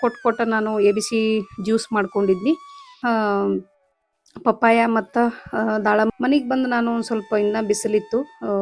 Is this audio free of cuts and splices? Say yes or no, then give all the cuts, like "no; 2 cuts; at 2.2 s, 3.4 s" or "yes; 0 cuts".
no; 2 cuts; at 3.0 s, 6.1 s